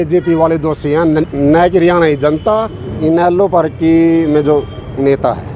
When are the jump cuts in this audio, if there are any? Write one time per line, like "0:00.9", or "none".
0:01.3
0:02.8

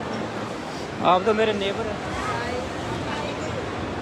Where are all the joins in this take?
0:01.7

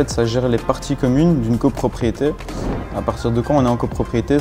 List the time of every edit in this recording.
none

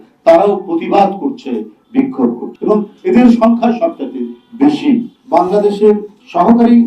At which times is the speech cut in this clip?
0:02.5
0:05.1

